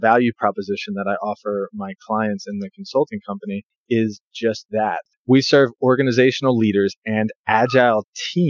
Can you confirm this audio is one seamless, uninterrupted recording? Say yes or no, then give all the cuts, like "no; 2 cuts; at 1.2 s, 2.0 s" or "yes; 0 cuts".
no; 2 cuts; at 3.7 s, 5.1 s